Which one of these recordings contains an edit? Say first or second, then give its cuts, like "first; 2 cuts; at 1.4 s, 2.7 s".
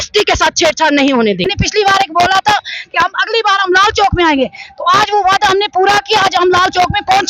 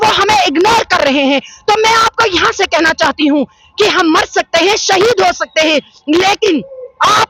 first; 1 cut; at 1.5 s